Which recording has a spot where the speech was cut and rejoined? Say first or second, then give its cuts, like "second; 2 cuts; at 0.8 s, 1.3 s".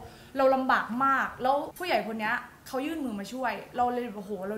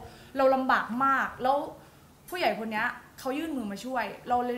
first; 1 cut; at 1.8 s